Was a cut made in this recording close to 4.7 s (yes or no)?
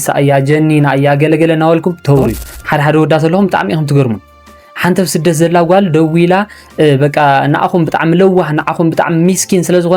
no